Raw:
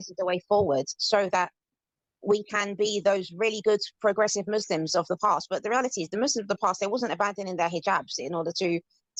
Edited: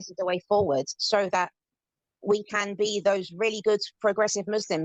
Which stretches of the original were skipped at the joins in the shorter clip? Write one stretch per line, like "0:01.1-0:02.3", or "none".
none